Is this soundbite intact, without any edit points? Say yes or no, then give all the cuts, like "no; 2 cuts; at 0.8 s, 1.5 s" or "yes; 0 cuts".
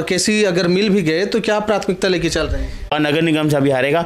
no; 1 cut; at 2.9 s